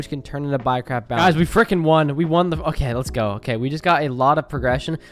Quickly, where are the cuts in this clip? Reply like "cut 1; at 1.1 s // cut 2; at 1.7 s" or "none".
cut 1; at 1.2 s